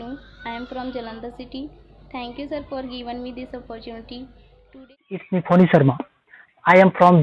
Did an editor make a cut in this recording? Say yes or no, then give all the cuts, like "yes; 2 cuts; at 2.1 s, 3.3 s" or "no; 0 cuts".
yes; 1 cut; at 5.0 s